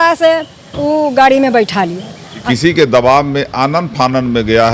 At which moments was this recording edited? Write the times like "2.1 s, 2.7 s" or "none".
2.0 s